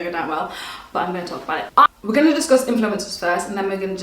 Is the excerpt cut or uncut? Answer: cut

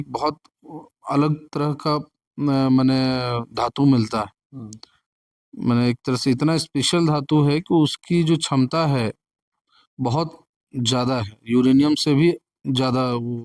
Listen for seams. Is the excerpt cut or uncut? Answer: uncut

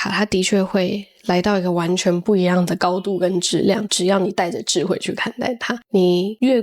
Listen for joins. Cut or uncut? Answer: uncut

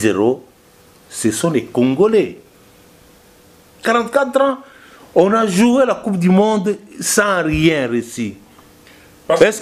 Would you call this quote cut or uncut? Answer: cut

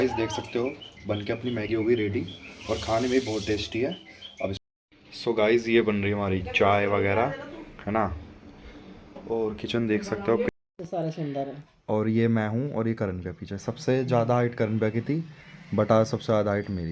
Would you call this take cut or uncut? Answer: cut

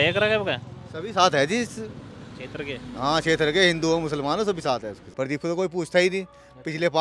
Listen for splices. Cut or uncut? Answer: cut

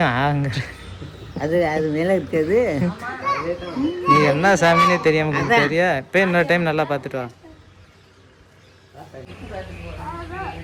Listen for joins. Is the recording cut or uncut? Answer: uncut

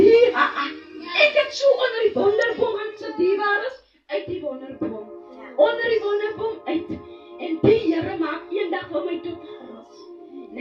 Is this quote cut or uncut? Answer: uncut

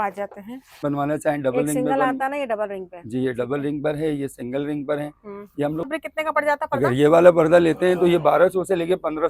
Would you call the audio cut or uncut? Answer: cut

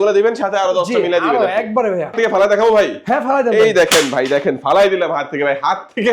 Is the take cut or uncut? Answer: cut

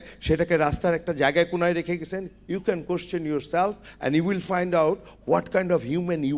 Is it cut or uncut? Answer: uncut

